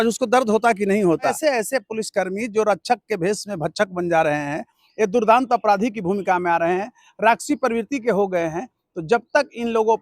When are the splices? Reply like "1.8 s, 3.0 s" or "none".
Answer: 1.3 s